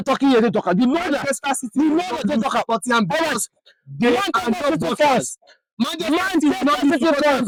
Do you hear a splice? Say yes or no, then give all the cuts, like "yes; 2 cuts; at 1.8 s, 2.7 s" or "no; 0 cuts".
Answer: no; 0 cuts